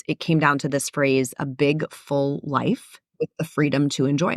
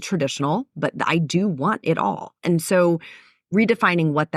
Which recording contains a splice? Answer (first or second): first